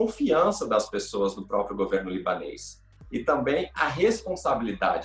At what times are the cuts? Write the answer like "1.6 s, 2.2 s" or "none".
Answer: none